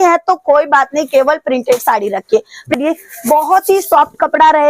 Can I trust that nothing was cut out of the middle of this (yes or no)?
no